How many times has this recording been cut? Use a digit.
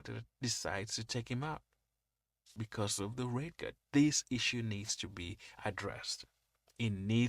1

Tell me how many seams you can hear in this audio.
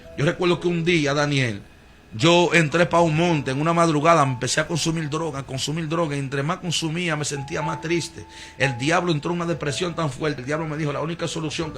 1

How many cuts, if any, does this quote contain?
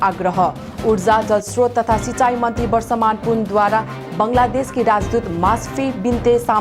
0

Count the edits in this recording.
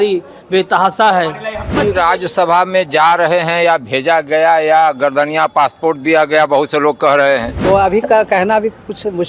2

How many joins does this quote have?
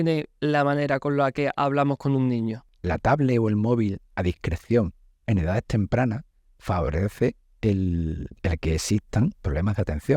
1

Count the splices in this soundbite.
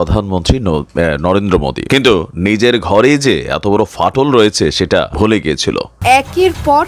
3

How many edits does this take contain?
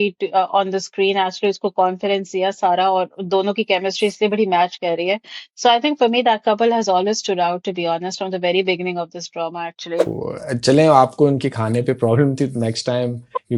1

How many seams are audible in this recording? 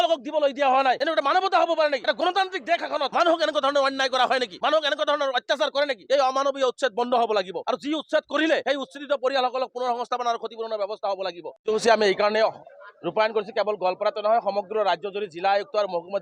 8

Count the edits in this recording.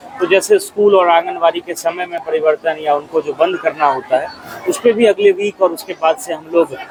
0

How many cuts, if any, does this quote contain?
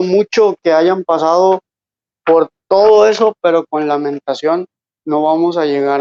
0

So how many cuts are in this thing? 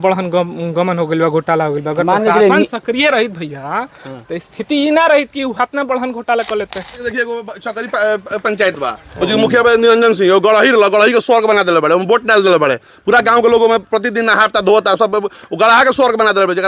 1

